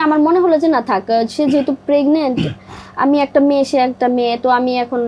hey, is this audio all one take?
yes; 0 cuts

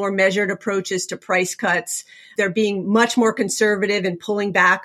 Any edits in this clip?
yes; 1 cut; at 2.2 s

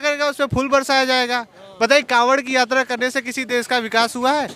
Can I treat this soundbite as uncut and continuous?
yes; 0 cuts

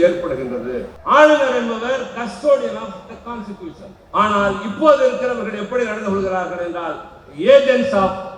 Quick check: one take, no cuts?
no; 2 cuts; at 0.9 s, 3.9 s

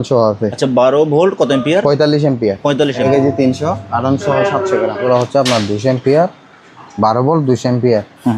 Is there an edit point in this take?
yes; 2 cuts; at 3.0 s, 5.0 s

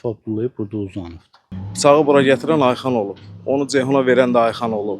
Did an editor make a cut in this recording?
yes; 1 cut; at 1.6 s

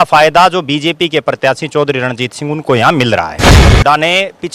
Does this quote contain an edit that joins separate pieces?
yes; 1 cut; at 3.6 s

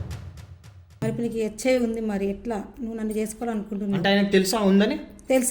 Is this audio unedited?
no; 1 cut; at 1.0 s

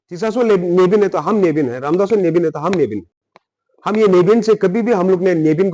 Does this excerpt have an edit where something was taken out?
no; 0 cuts

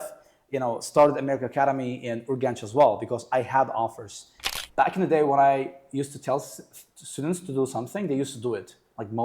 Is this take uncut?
no; 1 cut; at 4.4 s

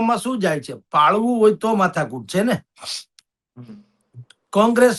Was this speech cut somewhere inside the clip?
no; 0 cuts

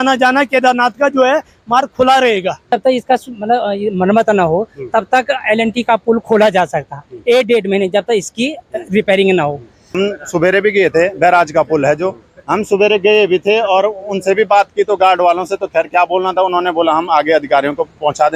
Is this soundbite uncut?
no; 2 cuts; at 2.7 s, 9.8 s

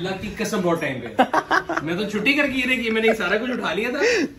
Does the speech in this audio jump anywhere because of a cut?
no; 0 cuts

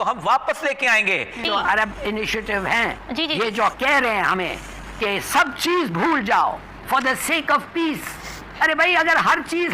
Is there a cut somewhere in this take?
yes; 1 cut; at 1.4 s

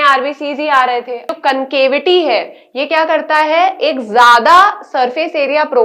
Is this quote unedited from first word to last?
no; 1 cut; at 1.3 s

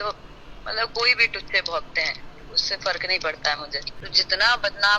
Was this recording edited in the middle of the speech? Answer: yes; 1 cut; at 4.0 s

